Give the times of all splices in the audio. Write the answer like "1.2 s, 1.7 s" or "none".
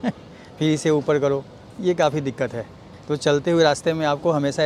none